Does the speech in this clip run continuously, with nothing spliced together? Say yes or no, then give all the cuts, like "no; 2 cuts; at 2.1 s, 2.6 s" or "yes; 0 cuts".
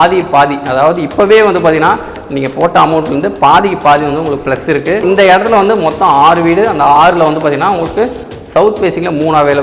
no; 1 cut; at 5.0 s